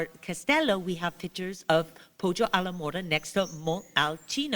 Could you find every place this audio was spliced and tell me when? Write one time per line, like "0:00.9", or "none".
none